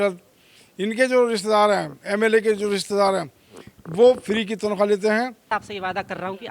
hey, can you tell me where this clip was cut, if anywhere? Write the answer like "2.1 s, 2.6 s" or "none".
5.6 s

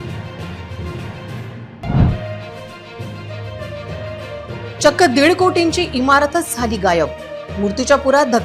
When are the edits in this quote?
1.0 s

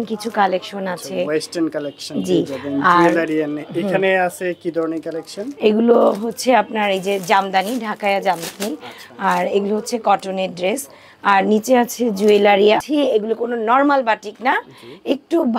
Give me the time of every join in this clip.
12.8 s

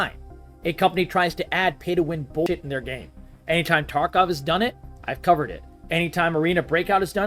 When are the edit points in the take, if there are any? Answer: 2.5 s

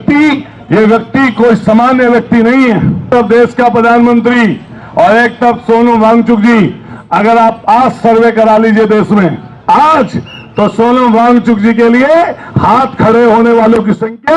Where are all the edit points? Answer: 3.0 s

